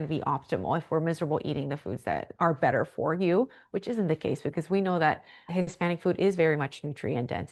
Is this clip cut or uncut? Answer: uncut